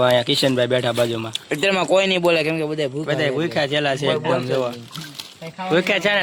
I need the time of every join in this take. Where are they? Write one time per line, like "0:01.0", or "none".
none